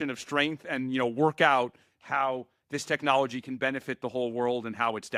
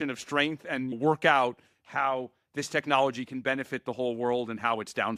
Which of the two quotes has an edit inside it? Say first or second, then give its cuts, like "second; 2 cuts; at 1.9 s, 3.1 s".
second; 1 cut; at 0.9 s